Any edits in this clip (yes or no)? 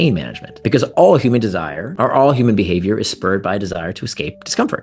no